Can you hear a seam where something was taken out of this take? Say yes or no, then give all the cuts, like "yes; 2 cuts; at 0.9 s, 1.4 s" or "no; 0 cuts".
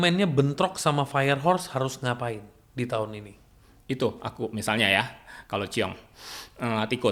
no; 0 cuts